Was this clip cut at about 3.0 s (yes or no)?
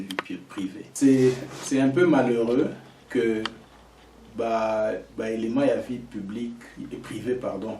no